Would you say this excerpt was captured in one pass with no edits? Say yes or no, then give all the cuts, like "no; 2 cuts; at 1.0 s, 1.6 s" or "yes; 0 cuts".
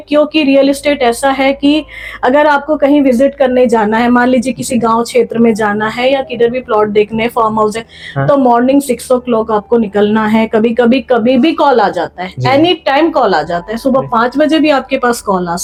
yes; 0 cuts